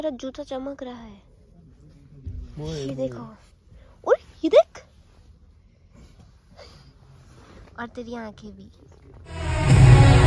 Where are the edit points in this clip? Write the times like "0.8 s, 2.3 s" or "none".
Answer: none